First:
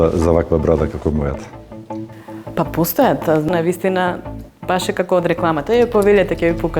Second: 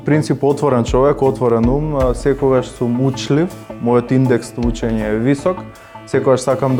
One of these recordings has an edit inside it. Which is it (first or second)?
first